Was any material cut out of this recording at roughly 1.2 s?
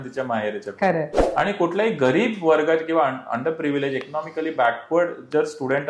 yes; 1 cut; at 1.2 s

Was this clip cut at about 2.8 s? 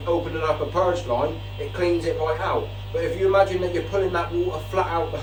no; 0 cuts

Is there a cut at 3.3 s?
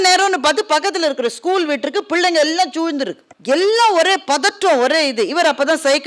yes; 1 cut; at 3.3 s

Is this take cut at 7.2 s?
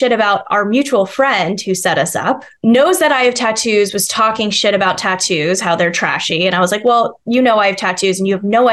no; 1 cut; at 2.5 s

